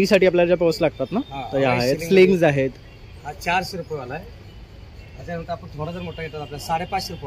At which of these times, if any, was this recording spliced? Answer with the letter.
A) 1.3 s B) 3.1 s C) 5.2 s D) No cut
D